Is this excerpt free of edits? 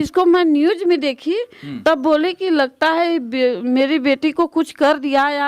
yes; 0 cuts

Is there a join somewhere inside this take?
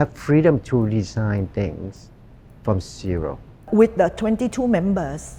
yes; 1 cut; at 3.5 s

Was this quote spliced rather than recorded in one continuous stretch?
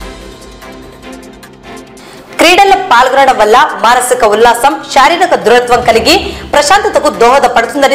yes; 1 cut; at 1.9 s

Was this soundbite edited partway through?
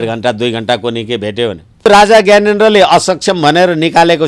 yes; 1 cut; at 1.9 s

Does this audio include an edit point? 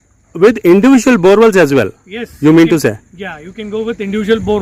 no; 0 cuts

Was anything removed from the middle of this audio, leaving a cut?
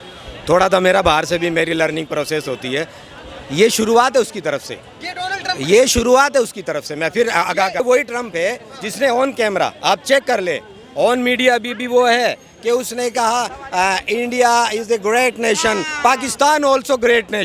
yes; 1 cut; at 7.8 s

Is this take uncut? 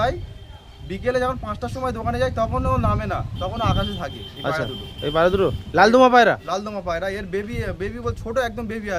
yes; 0 cuts

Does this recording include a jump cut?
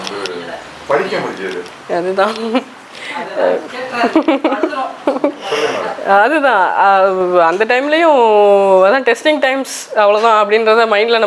no; 0 cuts

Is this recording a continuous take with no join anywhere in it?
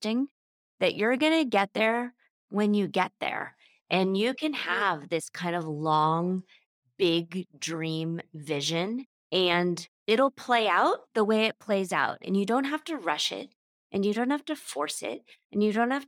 no; 1 cut; at 12.2 s

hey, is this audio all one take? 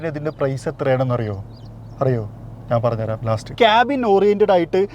no; 1 cut; at 3.5 s

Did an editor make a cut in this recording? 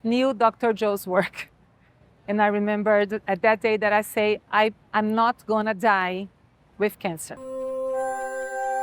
yes; 1 cut; at 7.4 s

